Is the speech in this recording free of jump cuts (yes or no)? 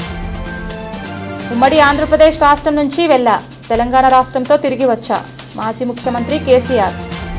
no